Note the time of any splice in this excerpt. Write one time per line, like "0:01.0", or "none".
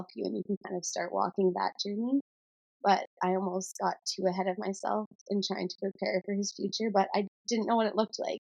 0:07.4